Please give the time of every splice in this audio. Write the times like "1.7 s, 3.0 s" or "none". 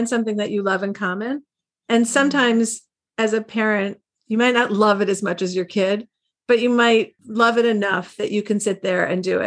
7.2 s